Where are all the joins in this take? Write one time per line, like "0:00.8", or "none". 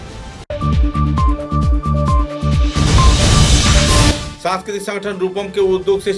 0:04.2